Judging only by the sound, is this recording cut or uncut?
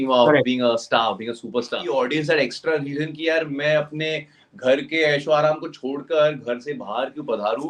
cut